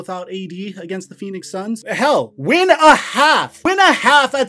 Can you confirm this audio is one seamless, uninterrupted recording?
no; 2 cuts; at 1.8 s, 3.5 s

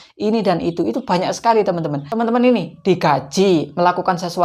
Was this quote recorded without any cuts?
no; 1 cut; at 2.0 s

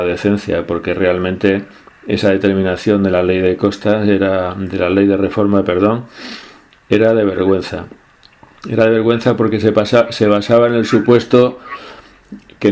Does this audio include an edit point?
yes; 1 cut; at 6.0 s

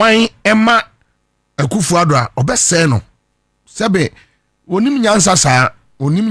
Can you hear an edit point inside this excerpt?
no; 0 cuts

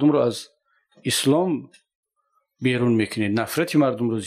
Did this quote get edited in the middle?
no; 0 cuts

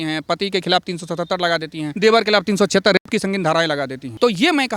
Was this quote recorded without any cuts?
yes; 0 cuts

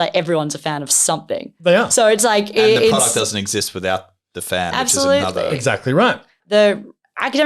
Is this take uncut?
yes; 0 cuts

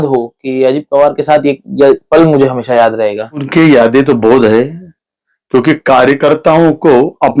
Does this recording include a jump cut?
yes; 1 cut; at 3.5 s

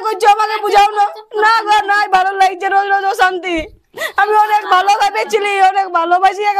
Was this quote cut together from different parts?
no; 0 cuts

